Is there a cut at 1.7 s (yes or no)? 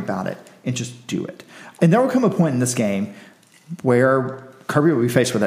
yes